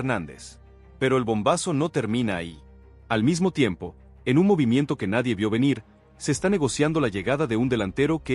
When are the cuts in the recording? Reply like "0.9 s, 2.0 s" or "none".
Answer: 1.0 s